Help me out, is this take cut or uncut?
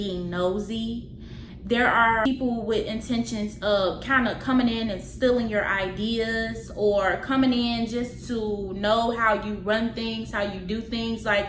cut